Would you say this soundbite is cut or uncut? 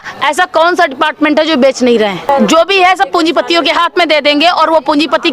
cut